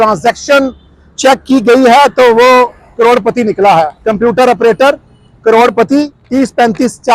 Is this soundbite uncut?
no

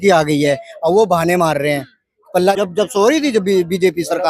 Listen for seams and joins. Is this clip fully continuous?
no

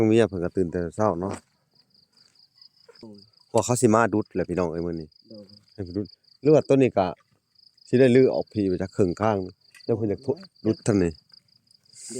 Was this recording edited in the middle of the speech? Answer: yes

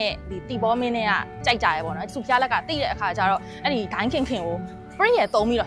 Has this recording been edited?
no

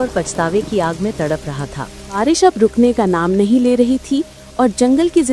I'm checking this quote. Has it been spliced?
yes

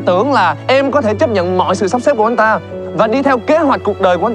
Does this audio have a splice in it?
no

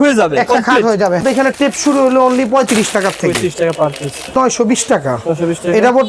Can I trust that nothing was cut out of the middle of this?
no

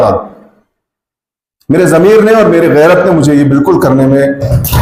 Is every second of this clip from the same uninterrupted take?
yes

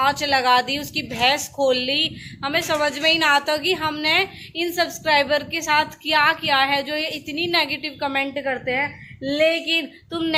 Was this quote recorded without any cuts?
yes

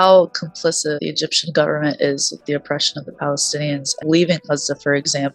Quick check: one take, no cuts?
no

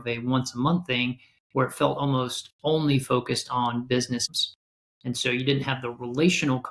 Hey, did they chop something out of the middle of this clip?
yes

